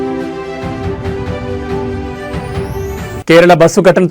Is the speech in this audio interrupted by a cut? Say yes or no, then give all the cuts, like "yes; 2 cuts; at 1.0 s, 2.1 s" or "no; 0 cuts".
yes; 1 cut; at 2.4 s